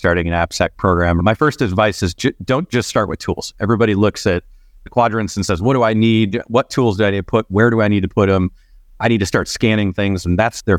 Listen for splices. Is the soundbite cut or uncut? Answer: cut